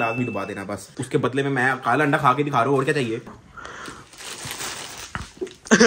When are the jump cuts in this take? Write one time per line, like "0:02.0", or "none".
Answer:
0:00.9
0:03.3